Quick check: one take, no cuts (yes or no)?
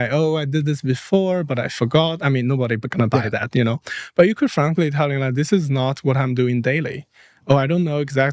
yes